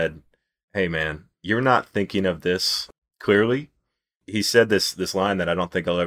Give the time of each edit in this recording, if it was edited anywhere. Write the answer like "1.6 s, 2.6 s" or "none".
0.8 s, 2.8 s, 4.2 s